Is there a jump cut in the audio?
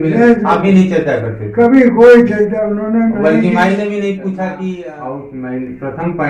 yes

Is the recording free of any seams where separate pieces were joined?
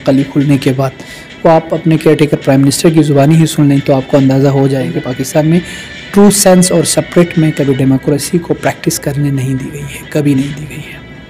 no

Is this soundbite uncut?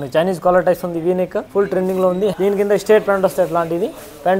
no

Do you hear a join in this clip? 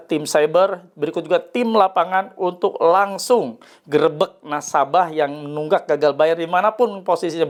no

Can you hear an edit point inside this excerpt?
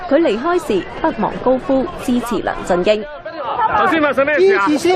yes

